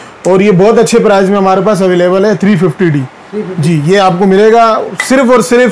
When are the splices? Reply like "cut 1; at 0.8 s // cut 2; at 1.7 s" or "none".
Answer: none